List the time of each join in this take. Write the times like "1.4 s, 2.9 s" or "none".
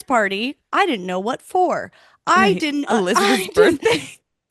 none